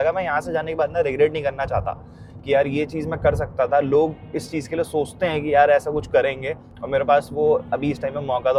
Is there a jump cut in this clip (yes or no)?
no